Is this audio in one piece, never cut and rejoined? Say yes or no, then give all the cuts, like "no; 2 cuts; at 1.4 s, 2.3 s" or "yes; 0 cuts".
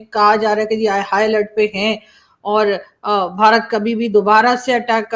yes; 0 cuts